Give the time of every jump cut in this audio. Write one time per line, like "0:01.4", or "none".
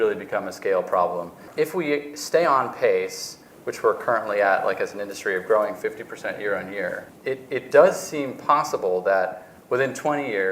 0:01.4
0:07.1